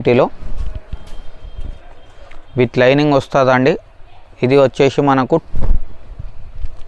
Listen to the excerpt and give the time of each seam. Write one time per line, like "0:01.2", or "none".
0:05.4